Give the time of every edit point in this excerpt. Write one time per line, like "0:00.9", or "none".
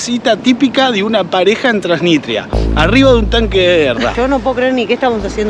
0:04.2